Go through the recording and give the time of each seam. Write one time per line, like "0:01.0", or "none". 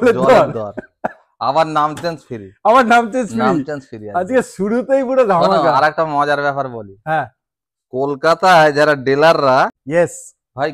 0:09.8